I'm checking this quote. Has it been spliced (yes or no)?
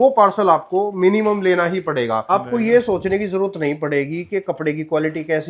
yes